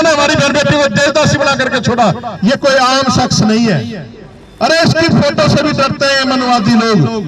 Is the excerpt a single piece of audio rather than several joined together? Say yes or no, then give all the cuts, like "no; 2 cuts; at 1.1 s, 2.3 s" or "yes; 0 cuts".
no; 1 cut; at 2.3 s